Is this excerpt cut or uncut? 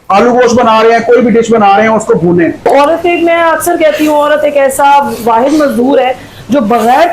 cut